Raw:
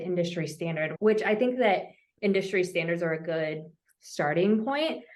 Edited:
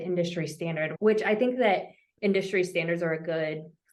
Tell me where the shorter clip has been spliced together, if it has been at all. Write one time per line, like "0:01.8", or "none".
none